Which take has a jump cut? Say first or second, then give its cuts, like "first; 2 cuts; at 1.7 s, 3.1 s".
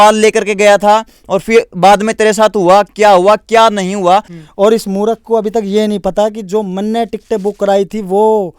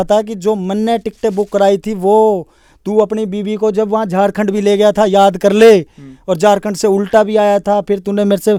first; 1 cut; at 4.3 s